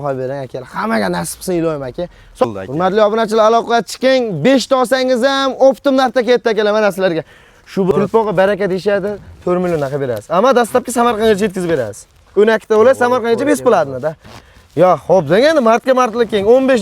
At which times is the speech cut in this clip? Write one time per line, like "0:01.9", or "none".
0:02.4
0:07.9